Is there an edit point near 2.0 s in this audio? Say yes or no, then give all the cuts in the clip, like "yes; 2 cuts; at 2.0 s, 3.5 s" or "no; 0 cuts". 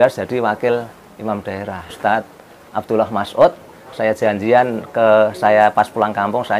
yes; 1 cut; at 2.0 s